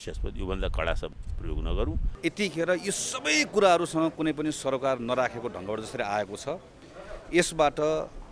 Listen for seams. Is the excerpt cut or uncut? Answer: cut